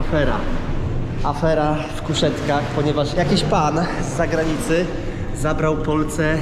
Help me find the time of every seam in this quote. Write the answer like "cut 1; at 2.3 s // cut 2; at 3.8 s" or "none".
none